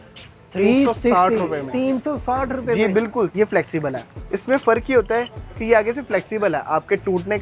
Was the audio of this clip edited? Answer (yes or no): yes